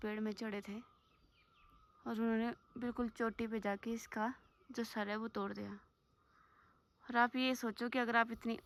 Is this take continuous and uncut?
yes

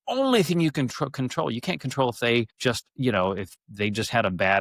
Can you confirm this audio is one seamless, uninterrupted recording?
no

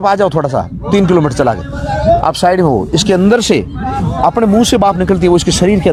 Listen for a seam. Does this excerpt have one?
no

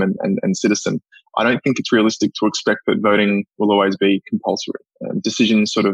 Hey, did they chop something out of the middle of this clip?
no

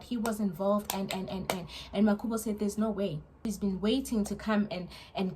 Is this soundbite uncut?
no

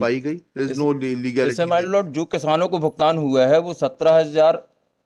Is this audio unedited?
yes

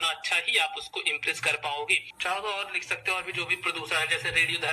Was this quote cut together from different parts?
yes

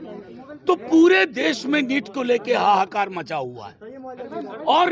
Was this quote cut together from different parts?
no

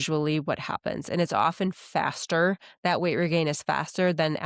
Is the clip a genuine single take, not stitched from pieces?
yes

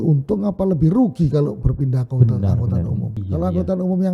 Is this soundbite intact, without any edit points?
no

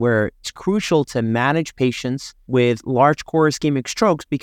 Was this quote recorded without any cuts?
yes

